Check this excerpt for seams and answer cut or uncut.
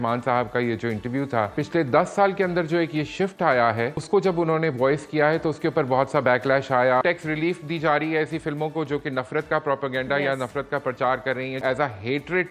cut